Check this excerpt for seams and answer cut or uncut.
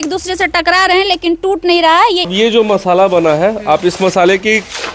cut